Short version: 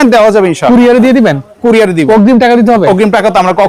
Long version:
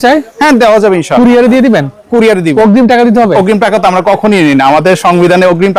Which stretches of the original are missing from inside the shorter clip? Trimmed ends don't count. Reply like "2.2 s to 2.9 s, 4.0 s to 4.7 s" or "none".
none